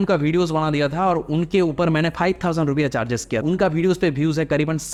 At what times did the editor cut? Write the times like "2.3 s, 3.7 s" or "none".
none